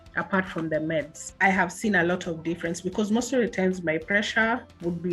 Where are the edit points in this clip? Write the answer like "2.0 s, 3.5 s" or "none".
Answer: 1.2 s